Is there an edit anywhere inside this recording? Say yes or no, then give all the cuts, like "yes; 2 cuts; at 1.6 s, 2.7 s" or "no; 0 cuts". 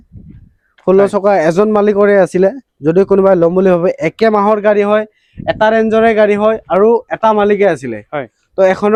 no; 0 cuts